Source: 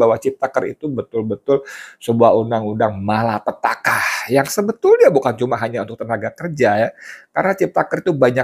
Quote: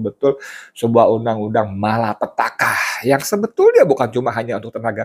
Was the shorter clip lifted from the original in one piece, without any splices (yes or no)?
yes